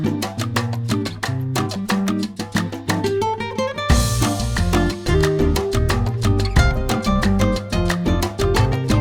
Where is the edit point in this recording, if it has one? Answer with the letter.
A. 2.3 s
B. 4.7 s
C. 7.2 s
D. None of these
D